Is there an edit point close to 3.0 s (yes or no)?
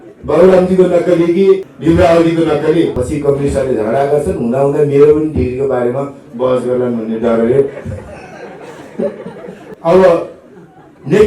yes